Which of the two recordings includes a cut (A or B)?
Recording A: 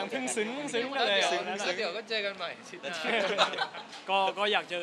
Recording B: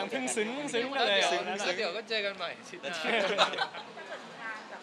B